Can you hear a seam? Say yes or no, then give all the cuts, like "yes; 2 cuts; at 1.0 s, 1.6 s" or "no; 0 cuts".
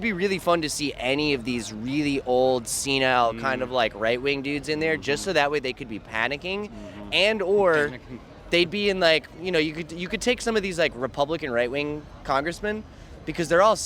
no; 0 cuts